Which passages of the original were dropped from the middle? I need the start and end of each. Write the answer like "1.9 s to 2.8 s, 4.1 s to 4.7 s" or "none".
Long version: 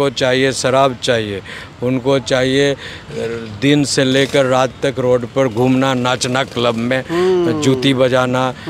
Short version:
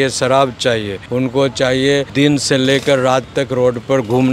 1.4 s to 1.7 s, 2.8 s to 3.6 s